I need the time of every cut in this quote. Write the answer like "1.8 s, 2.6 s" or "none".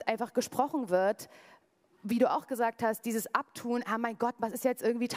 none

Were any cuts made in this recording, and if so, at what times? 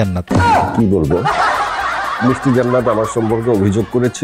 none

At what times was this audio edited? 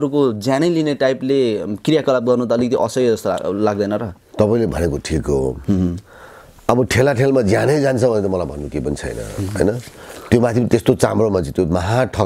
none

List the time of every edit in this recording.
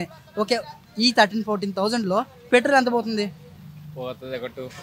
none

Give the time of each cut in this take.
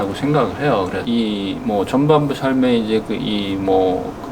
1.0 s

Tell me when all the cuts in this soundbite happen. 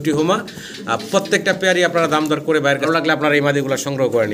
2.9 s

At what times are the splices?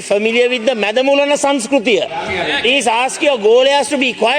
2.2 s

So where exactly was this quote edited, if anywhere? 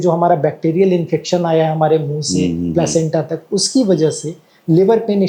none

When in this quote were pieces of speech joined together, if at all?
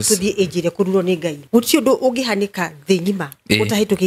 1.4 s

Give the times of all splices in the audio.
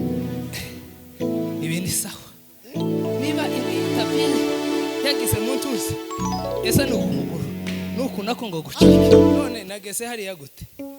9.5 s

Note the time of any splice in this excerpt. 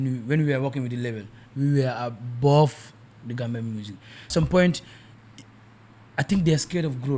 4.3 s

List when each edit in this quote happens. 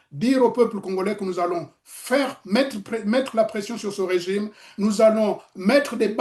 none

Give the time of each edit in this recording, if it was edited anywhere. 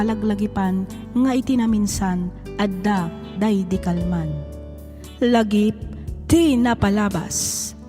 4.2 s

